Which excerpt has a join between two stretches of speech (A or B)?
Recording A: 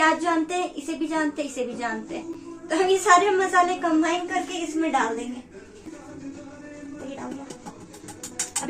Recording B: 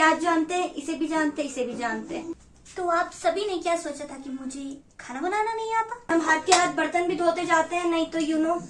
B